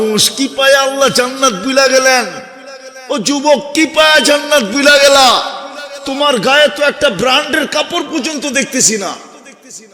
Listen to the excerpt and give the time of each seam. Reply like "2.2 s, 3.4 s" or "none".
none